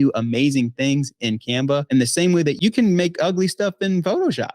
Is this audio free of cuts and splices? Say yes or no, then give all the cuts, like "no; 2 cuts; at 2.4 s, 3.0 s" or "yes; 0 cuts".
no; 1 cut; at 1.9 s